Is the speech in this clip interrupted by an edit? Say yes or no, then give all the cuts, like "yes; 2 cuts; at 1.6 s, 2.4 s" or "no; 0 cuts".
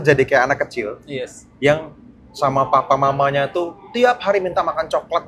no; 0 cuts